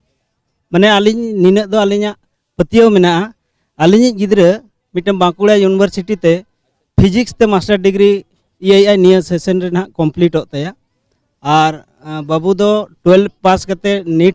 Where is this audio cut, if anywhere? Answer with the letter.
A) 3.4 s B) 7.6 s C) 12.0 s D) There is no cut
D